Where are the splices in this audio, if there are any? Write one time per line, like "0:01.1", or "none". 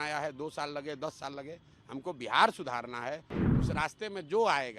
0:03.4